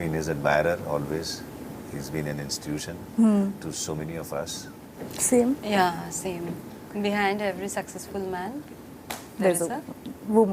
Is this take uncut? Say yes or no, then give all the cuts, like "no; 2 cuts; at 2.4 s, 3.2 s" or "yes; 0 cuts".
no; 1 cut; at 6.9 s